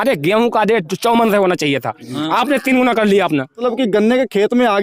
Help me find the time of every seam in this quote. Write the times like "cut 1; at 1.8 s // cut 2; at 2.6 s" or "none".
cut 1; at 3.6 s